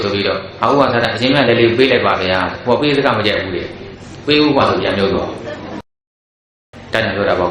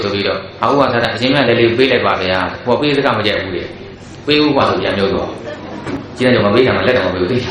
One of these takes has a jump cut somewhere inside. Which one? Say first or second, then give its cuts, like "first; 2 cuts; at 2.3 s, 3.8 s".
first; 1 cut; at 6.2 s